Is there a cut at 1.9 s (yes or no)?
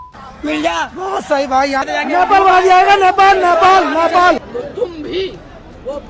yes